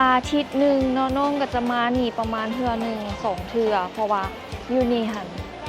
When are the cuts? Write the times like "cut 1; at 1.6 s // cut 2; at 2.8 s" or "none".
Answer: none